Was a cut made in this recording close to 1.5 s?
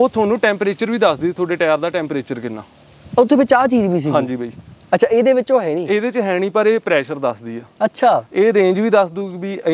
no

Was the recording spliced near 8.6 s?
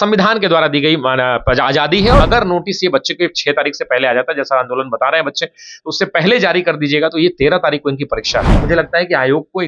yes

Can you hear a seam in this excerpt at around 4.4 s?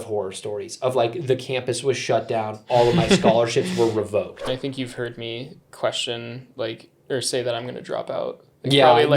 yes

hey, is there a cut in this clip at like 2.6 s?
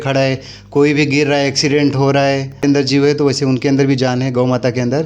yes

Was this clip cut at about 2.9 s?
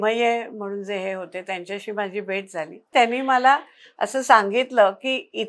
yes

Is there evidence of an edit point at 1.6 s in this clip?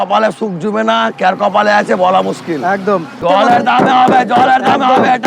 no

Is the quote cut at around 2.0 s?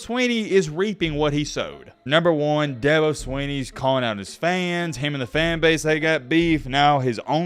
yes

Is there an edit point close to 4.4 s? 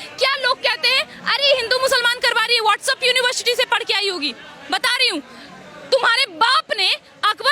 no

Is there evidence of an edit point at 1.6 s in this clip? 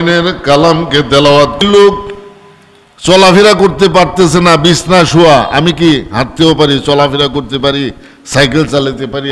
yes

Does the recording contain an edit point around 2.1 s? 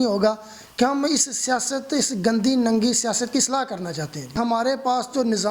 no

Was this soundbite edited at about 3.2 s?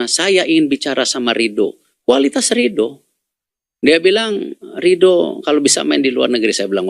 no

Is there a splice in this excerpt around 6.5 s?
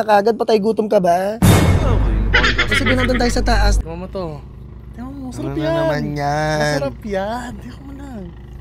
no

